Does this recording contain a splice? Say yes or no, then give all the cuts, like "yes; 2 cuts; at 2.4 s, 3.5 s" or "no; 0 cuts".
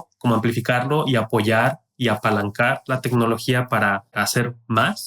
yes; 1 cut; at 4.1 s